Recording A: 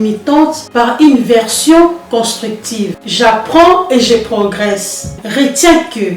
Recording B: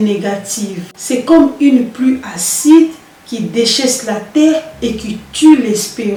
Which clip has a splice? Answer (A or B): A